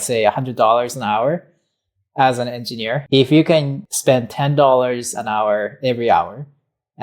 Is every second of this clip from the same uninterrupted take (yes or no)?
no